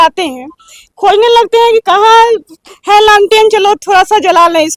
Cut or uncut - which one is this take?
uncut